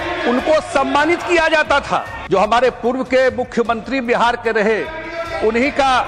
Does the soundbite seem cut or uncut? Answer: cut